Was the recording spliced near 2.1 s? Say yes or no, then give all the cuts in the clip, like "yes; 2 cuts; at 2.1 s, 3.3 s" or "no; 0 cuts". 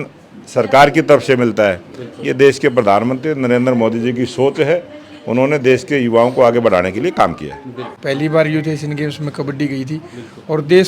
no; 1 cut; at 7.9 s